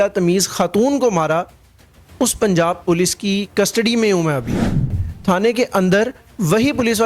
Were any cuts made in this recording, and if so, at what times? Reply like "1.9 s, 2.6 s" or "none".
5.0 s